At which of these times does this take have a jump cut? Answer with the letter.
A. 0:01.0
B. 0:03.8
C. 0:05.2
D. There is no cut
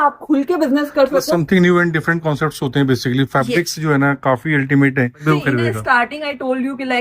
C